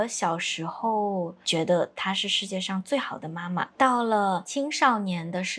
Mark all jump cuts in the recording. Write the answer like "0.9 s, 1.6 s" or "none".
1.4 s, 3.7 s, 4.5 s